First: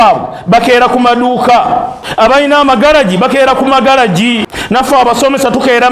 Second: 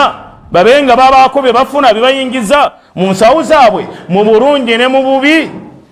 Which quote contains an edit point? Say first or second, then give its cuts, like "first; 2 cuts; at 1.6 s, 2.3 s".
first; 2 cuts; at 2.0 s, 4.5 s